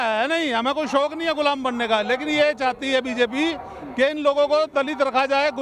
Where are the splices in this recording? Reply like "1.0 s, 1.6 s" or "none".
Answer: none

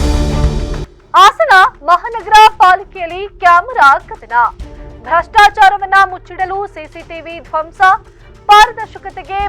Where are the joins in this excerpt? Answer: 0.9 s

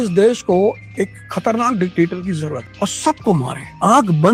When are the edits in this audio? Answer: none

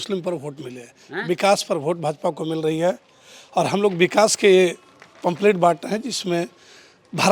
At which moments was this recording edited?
none

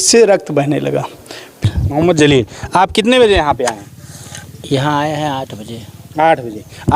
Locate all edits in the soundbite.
1.6 s

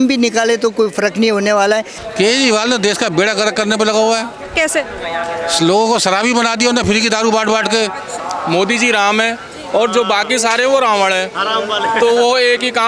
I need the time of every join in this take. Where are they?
2.0 s, 8.2 s

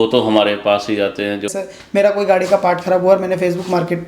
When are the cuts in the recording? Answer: 1.5 s

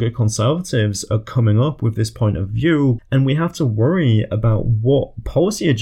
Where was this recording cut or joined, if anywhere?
3.0 s

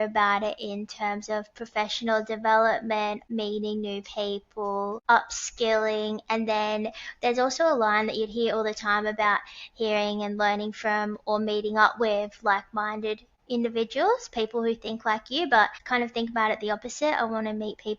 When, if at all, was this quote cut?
3.2 s, 5.0 s, 13.3 s, 15.8 s

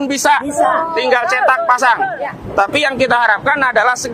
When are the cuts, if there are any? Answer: none

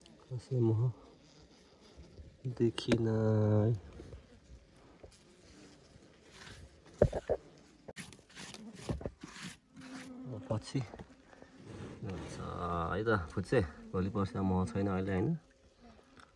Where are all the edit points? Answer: 8.0 s

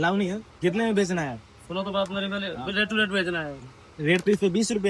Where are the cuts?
none

